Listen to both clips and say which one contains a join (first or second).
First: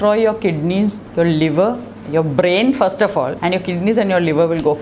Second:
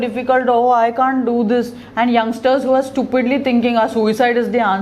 first